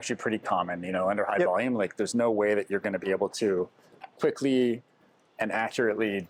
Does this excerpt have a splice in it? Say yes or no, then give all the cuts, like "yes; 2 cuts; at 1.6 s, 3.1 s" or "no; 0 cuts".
no; 0 cuts